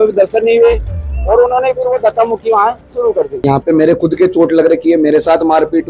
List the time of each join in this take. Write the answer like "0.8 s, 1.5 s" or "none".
3.4 s